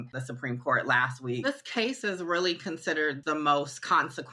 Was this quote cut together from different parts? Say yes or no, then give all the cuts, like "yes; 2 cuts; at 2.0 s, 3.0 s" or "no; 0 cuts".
yes; 2 cuts; at 1.4 s, 3.2 s